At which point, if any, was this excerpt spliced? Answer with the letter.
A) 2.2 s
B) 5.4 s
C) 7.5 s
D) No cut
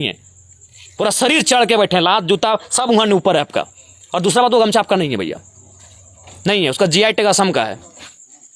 D